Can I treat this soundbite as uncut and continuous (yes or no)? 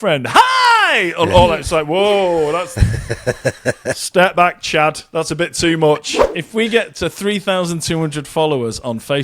no